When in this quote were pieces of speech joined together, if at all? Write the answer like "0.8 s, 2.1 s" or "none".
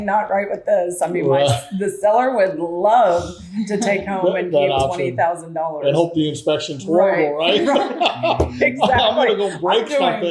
none